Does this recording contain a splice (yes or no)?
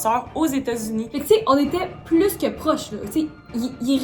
yes